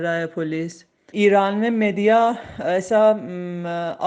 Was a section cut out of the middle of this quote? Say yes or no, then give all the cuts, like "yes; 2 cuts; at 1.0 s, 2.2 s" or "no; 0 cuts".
yes; 1 cut; at 1.1 s